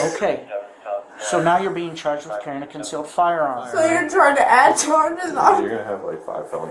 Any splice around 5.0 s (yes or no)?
no